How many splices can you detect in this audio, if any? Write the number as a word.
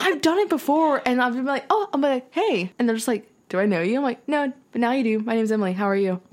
one